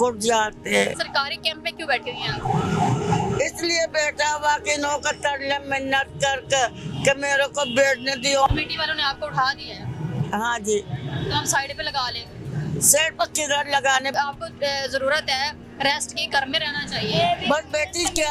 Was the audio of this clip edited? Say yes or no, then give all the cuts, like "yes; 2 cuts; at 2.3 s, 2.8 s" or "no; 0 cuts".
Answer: yes; 3 cuts; at 1.0 s, 8.5 s, 14.2 s